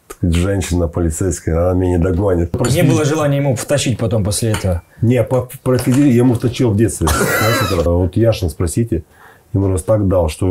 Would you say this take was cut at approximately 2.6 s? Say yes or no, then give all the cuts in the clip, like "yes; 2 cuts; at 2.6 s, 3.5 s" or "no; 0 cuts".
yes; 2 cuts; at 2.6 s, 7.9 s